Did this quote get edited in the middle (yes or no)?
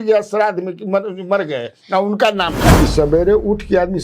yes